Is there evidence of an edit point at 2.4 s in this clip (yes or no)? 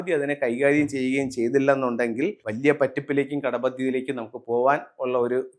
yes